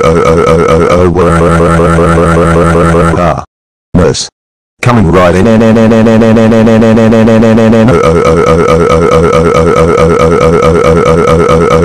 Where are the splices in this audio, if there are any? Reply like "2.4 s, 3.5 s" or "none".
10.4 s